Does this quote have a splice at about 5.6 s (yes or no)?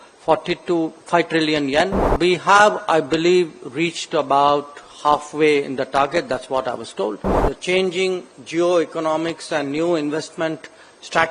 no